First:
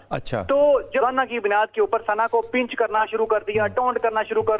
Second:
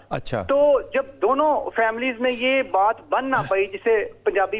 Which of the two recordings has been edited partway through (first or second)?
first